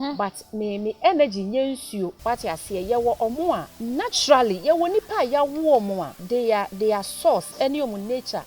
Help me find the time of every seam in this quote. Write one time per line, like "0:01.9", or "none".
0:02.2
0:03.7
0:06.1